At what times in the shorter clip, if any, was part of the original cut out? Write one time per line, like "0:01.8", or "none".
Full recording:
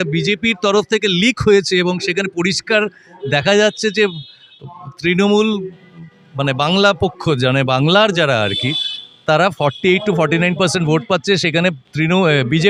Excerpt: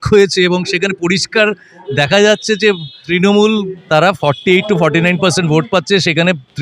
0:02.9
0:03.8